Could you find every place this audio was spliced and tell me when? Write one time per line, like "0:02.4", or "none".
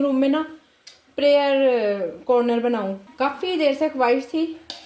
none